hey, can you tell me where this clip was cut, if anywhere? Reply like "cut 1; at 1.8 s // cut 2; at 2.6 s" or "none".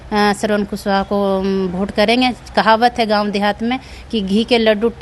none